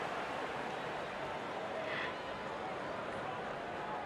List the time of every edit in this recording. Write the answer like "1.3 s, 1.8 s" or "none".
none